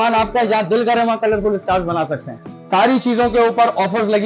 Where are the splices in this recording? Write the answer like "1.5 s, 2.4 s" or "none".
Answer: 2.4 s